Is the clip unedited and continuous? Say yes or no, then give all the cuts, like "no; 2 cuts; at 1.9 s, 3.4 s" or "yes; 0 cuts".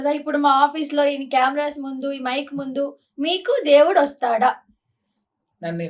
yes; 0 cuts